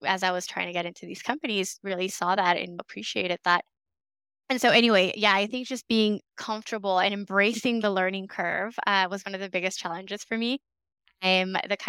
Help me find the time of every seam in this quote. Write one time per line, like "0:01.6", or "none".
none